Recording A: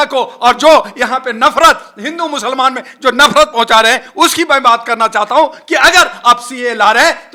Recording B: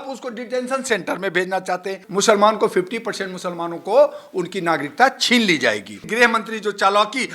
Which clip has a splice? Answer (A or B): B